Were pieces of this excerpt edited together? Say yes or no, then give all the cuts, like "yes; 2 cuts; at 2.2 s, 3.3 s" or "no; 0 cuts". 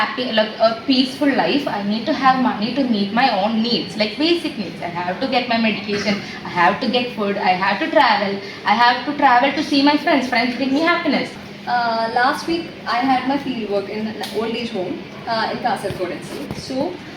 yes; 1 cut; at 11.4 s